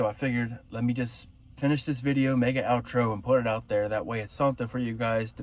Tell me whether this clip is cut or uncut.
uncut